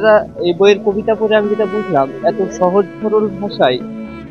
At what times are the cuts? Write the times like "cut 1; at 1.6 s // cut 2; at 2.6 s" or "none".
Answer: none

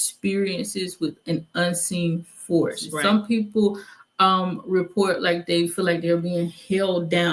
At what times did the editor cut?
cut 1; at 2.9 s

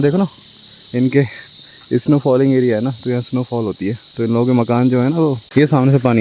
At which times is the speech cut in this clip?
cut 1; at 4.0 s // cut 2; at 5.4 s

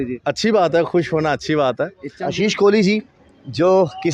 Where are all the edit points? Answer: cut 1; at 2.1 s

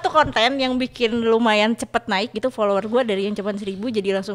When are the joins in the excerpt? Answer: none

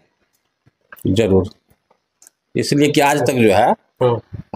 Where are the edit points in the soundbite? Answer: none

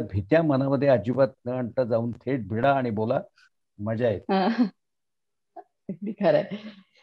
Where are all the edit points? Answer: none

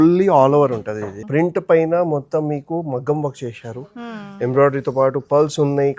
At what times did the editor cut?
cut 1; at 1.1 s

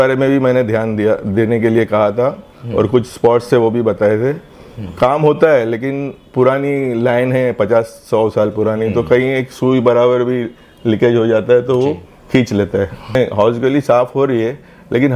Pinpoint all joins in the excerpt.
cut 1; at 13.1 s

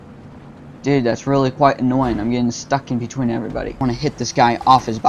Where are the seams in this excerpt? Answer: cut 1; at 3.8 s

